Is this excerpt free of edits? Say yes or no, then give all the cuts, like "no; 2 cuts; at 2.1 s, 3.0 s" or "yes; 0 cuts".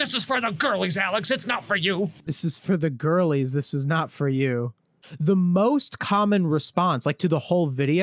no; 2 cuts; at 2.3 s, 4.9 s